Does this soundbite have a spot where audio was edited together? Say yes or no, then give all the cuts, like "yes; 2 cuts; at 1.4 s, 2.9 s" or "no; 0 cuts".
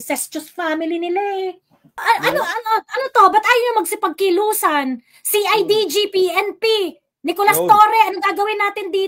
yes; 1 cut; at 2.0 s